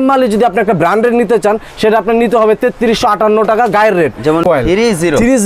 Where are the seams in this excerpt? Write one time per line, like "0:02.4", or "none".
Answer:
0:04.4